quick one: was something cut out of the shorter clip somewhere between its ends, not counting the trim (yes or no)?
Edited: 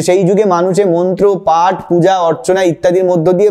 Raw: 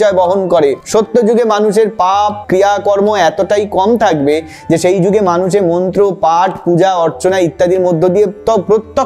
no